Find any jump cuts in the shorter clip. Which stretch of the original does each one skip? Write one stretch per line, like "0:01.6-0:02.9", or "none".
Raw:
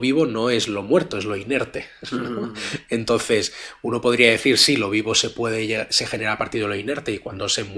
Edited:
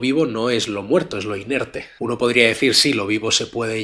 0:01.8-0:03.7